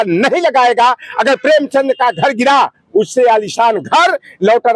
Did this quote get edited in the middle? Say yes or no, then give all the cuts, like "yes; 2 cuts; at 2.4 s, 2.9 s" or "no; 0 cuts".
no; 0 cuts